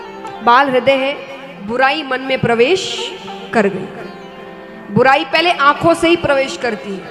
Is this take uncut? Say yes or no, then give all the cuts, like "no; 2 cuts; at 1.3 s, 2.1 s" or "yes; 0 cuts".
yes; 0 cuts